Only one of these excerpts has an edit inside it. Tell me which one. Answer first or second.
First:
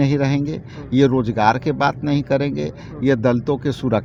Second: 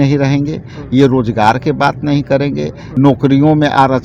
second